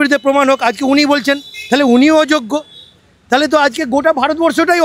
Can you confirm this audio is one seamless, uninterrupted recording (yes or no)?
yes